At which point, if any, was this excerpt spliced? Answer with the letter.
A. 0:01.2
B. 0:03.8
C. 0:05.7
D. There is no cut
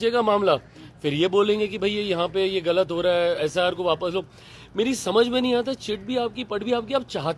D